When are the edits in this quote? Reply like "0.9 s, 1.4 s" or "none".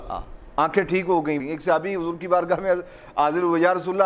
1.4 s